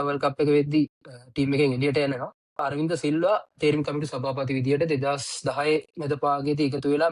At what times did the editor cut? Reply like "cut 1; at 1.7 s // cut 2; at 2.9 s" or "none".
cut 1; at 2.6 s